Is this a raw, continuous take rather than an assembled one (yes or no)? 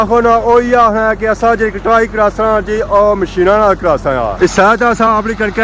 yes